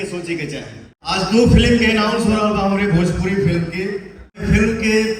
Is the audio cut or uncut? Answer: cut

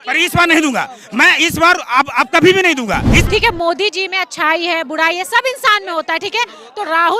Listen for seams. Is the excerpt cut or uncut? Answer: cut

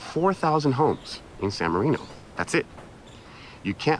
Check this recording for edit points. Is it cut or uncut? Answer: uncut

